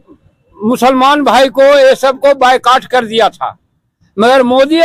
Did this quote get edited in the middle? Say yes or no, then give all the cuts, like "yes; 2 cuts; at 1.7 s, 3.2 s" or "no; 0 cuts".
no; 0 cuts